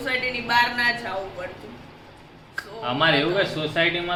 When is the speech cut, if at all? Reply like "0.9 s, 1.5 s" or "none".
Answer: none